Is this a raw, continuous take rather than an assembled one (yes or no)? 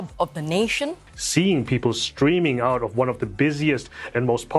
no